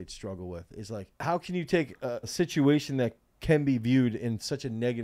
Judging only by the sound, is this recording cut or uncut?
cut